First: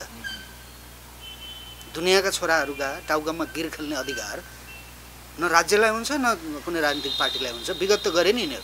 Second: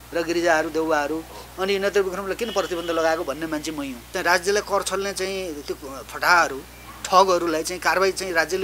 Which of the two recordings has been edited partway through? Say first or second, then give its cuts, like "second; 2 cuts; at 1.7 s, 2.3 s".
second; 1 cut; at 4.0 s